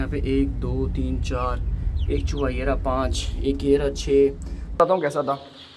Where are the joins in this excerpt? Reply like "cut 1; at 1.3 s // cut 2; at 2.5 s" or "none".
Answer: cut 1; at 4.8 s